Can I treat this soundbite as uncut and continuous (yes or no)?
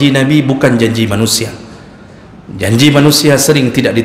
yes